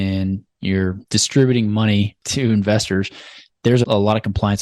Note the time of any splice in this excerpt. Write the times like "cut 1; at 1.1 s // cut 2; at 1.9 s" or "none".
cut 1; at 1.0 s // cut 2; at 2.2 s // cut 3; at 3.8 s